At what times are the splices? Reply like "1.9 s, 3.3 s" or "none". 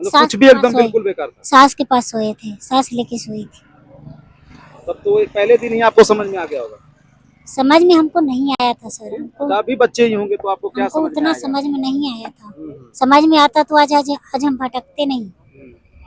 none